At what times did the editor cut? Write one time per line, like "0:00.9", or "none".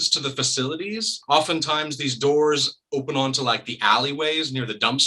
0:01.1